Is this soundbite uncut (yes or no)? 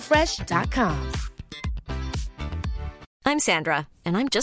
no